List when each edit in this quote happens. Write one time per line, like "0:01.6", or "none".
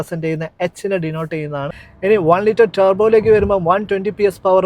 0:01.8